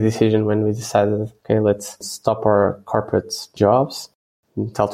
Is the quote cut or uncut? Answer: uncut